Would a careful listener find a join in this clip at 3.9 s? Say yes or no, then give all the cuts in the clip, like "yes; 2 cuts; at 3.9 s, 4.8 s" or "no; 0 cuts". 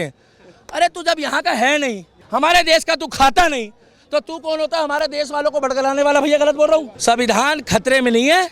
no; 2 cuts; at 2.1 s, 6.9 s